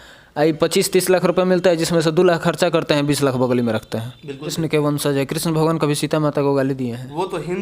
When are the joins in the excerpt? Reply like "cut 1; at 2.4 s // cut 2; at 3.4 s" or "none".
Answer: cut 1; at 4.5 s